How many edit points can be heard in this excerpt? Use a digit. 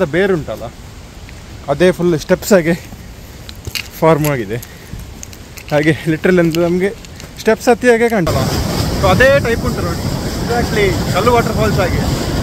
1